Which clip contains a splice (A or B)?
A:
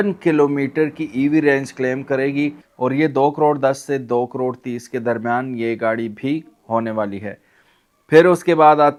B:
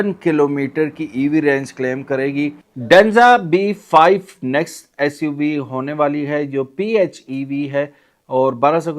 B